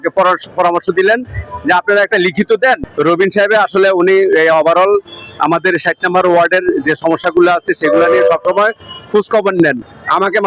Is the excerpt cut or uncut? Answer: cut